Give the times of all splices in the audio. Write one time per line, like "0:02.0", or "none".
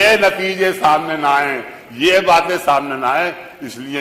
none